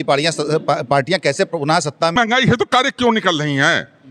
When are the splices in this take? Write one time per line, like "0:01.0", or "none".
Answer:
0:02.2

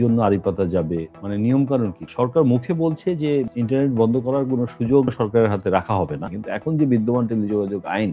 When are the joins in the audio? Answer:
0:01.2
0:02.1
0:03.5
0:05.1
0:06.3

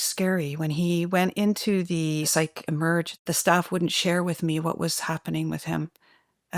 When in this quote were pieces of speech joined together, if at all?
0:02.3
0:03.2

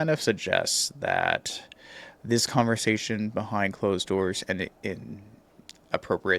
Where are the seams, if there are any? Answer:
none

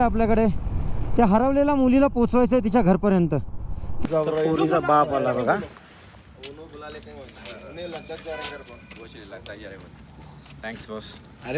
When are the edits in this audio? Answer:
0:03.9

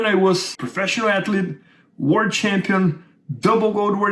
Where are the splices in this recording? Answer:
none

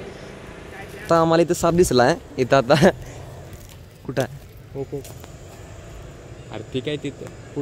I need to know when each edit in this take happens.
0:01.1

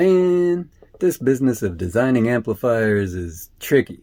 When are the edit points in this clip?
none

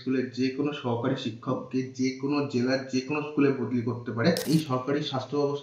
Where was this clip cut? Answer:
0:04.4

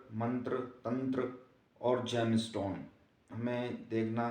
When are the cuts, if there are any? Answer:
0:03.3

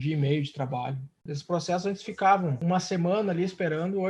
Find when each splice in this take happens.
0:01.2
0:02.6

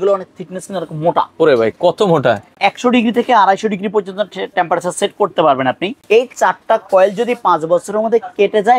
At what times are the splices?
0:02.5
0:06.0

